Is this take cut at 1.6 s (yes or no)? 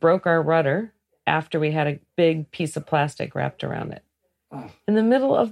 yes